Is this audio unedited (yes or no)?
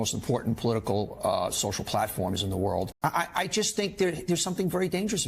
no